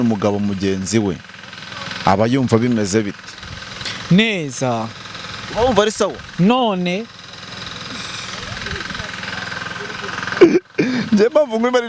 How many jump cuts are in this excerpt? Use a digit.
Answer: 0